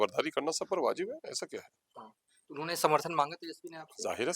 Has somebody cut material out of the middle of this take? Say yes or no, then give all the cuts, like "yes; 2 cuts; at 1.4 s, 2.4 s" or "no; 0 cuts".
no; 0 cuts